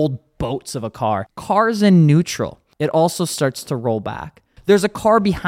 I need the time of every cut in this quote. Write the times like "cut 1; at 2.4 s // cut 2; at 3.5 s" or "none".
cut 1; at 1.3 s // cut 2; at 2.6 s // cut 3; at 4.5 s

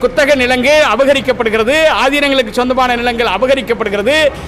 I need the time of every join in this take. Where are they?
none

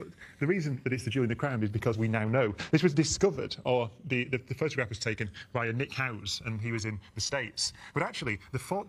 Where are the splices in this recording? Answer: none

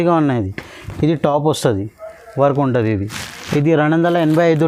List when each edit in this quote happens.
none

